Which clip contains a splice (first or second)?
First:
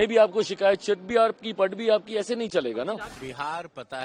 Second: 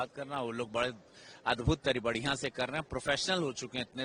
first